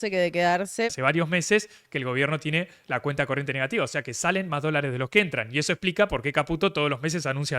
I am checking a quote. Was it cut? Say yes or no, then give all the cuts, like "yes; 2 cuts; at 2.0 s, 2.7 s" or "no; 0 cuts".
yes; 1 cut; at 0.9 s